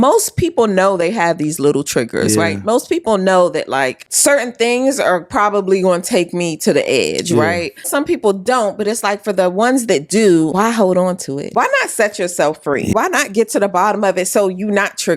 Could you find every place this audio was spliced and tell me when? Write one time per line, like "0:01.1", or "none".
0:04.1
0:07.9
0:10.5
0:11.5
0:12.9